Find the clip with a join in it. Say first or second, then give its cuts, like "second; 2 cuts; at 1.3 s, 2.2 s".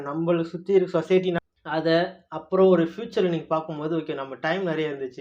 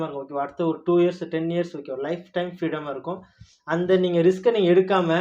first; 1 cut; at 1.4 s